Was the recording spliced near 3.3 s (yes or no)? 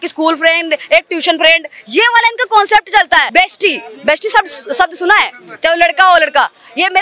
yes